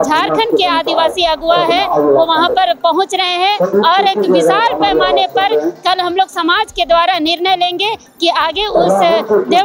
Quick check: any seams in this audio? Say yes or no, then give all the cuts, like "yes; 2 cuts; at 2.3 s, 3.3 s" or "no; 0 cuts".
no; 0 cuts